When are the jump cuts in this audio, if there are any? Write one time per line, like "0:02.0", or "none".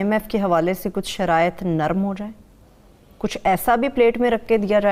none